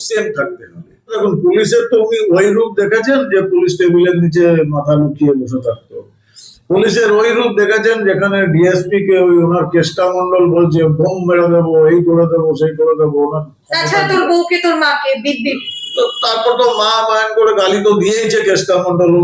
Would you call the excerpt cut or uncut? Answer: cut